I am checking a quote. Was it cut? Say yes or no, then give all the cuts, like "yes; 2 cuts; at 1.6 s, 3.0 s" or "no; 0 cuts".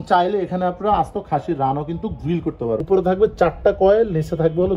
yes; 1 cut; at 2.8 s